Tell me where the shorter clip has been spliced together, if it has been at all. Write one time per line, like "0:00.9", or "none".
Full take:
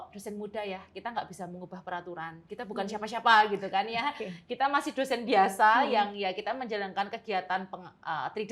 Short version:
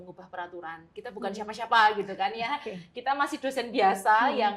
none